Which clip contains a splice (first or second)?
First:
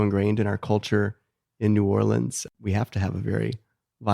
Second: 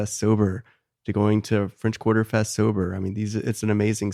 first